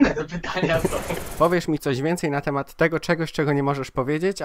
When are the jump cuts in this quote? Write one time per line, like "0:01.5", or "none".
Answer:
0:01.2